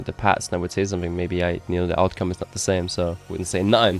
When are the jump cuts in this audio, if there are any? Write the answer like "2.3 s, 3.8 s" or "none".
none